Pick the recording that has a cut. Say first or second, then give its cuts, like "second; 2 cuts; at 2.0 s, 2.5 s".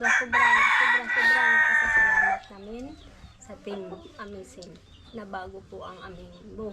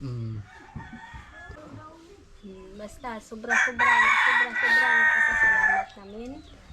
second; 1 cut; at 1.5 s